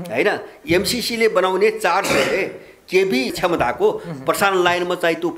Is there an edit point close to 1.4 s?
no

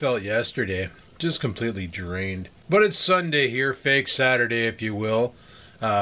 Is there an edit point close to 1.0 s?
no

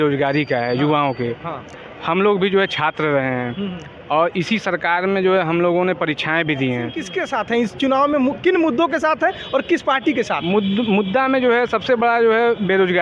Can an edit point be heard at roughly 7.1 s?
yes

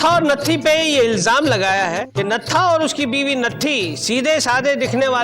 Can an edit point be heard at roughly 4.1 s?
no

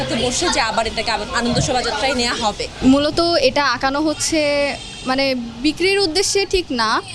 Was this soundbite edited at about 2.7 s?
yes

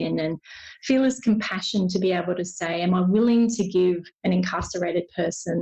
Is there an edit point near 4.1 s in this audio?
yes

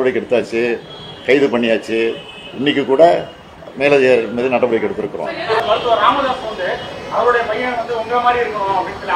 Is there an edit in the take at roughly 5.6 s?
yes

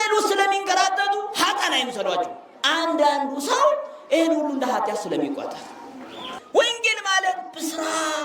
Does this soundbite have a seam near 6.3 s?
yes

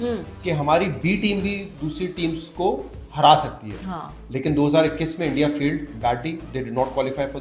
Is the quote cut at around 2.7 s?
no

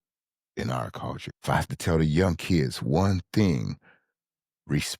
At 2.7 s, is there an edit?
no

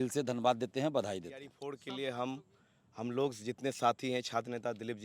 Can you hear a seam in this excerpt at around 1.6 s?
yes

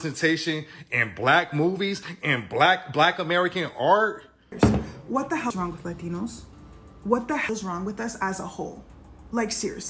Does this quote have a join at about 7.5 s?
yes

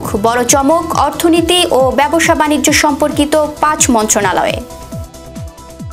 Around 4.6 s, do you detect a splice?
no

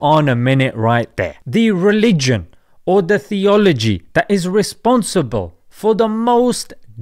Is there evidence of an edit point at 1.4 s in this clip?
yes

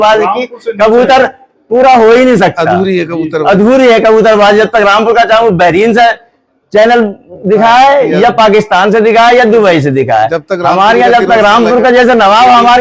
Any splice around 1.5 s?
no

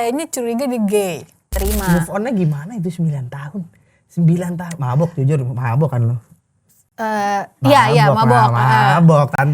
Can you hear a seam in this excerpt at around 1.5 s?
yes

